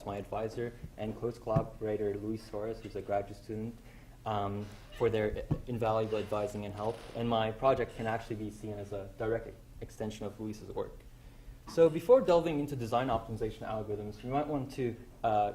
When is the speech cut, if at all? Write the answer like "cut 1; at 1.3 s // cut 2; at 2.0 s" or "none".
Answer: cut 1; at 6.0 s